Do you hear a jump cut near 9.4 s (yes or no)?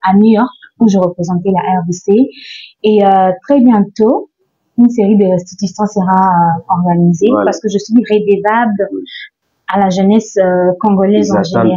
no